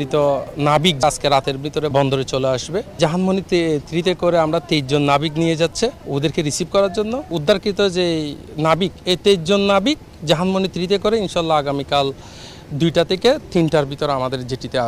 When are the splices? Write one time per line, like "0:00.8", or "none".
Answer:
0:01.0
0:01.9
0:03.0
0:06.0
0:07.3